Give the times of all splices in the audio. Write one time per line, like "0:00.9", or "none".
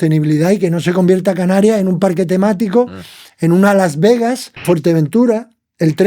0:04.6

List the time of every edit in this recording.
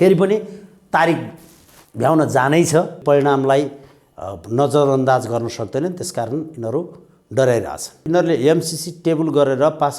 0:03.0
0:08.0

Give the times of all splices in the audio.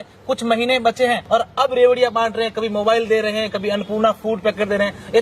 0:01.2

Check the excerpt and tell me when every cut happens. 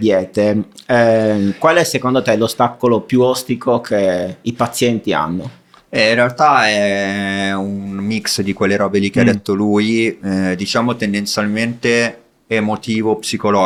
none

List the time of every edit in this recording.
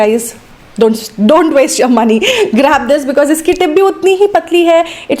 none

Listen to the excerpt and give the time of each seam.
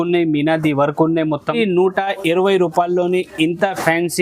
0:01.6

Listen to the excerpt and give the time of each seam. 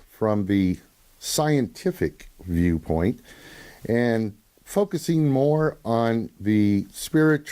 0:03.7

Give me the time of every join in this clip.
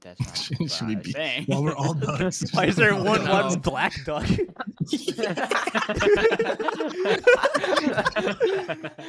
none

